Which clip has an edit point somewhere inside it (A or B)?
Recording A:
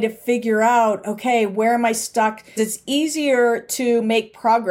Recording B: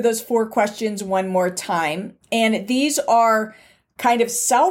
A